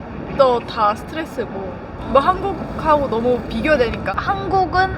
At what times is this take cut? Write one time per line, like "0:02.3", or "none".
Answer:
0:04.0